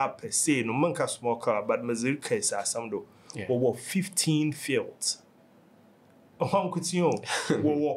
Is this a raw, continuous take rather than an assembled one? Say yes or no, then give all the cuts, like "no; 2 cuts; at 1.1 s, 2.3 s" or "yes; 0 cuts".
yes; 0 cuts